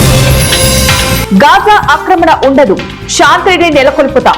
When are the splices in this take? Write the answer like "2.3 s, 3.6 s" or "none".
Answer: 1.2 s